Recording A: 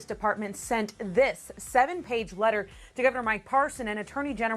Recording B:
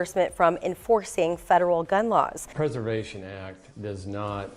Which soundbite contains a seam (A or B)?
B